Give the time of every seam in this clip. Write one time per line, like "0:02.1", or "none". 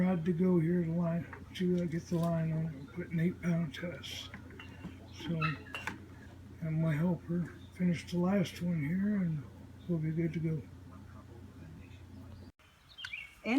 0:12.4